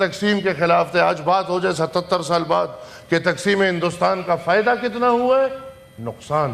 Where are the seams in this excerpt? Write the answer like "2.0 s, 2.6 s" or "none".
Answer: none